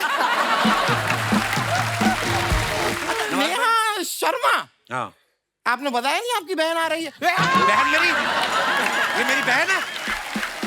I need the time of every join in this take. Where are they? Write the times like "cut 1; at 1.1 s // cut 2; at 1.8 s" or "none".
cut 1; at 3.3 s